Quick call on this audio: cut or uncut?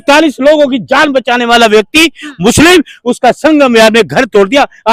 uncut